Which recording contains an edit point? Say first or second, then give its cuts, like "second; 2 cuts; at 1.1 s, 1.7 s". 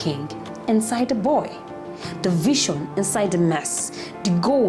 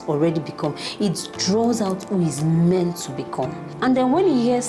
second; 1 cut; at 3.6 s